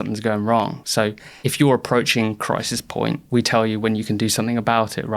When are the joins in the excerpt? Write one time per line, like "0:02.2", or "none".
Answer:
0:00.9
0:03.2